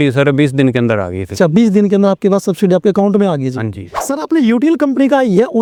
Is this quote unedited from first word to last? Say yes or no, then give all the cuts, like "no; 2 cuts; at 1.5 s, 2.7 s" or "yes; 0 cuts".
yes; 0 cuts